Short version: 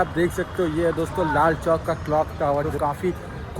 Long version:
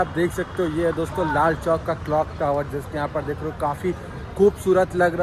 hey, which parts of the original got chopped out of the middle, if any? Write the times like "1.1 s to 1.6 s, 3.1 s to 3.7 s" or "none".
2.7 s to 3.5 s